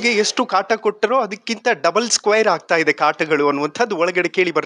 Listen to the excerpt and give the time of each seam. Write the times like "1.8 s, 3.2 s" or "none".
none